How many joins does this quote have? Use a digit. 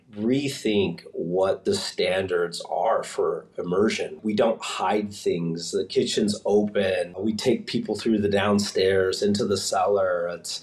2